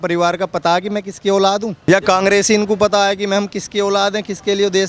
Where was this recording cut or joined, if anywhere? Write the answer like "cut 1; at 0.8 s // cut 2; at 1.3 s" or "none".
cut 1; at 1.9 s

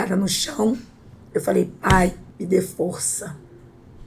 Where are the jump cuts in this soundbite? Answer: cut 1; at 2.3 s

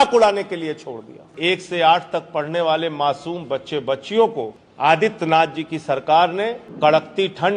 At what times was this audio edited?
cut 1; at 1.3 s // cut 2; at 4.6 s // cut 3; at 6.6 s

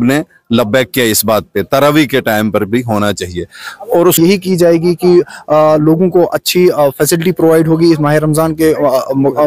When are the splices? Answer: cut 1; at 4.2 s

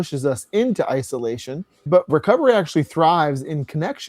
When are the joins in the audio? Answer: cut 1; at 2.1 s

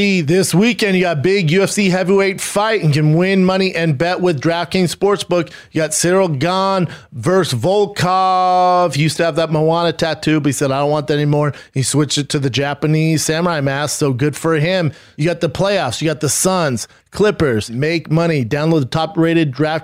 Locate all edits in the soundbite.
cut 1; at 15.0 s // cut 2; at 17.7 s

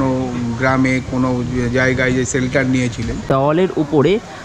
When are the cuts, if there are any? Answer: cut 1; at 3.3 s

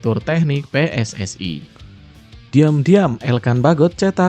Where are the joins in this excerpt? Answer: cut 1; at 2.3 s

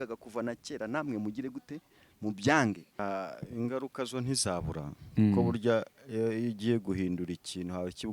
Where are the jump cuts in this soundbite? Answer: cut 1; at 2.9 s

